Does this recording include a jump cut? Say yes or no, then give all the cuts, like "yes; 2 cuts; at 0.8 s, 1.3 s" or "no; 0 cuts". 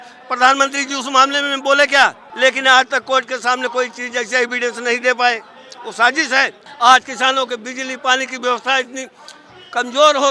yes; 2 cuts; at 2.2 s, 6.7 s